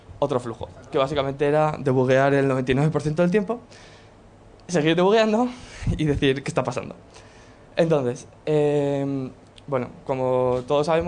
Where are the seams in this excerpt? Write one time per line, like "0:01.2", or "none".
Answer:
0:08.2